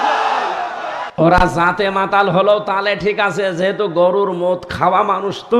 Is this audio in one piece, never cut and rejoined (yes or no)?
no